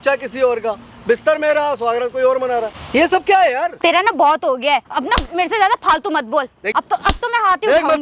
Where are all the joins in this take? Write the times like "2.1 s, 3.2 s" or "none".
2.8 s, 3.7 s, 4.9 s, 6.7 s

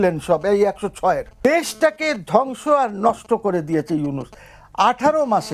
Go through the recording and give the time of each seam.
1.3 s

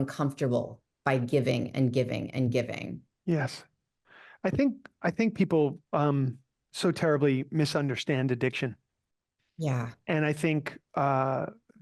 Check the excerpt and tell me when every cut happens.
none

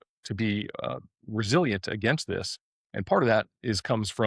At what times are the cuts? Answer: none

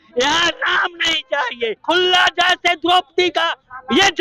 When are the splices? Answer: 1.8 s

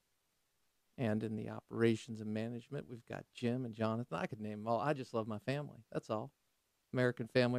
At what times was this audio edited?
none

